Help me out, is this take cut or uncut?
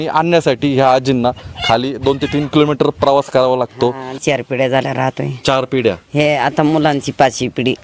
cut